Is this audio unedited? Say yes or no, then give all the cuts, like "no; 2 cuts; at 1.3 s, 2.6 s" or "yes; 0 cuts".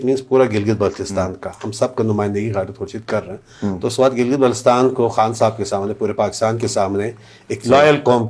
yes; 0 cuts